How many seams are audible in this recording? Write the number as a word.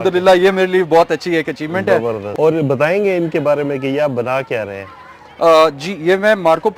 zero